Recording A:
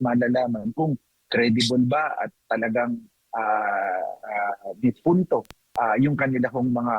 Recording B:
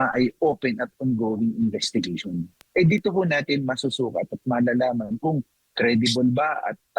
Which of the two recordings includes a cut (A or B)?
B